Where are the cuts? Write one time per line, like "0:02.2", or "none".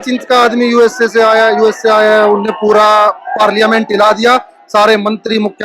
none